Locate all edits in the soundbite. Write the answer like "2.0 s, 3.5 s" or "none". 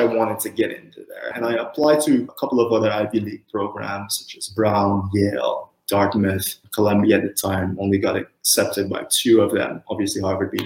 1.3 s, 2.3 s